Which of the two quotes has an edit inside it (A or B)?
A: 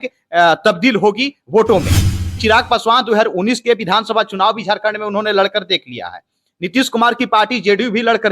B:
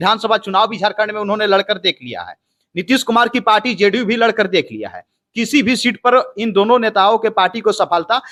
A